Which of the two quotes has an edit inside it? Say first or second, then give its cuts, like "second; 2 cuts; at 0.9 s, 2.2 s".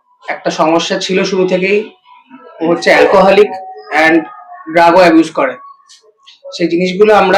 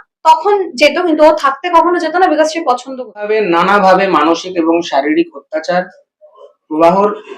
second; 1 cut; at 3.3 s